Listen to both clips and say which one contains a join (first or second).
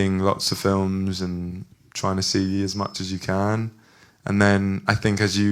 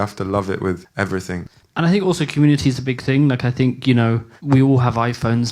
second